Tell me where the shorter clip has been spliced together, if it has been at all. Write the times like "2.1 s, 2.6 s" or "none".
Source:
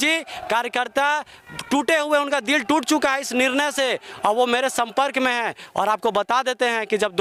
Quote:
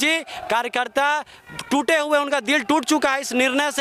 none